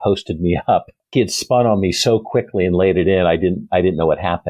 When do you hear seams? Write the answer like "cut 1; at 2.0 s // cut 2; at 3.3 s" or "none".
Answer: cut 1; at 1.1 s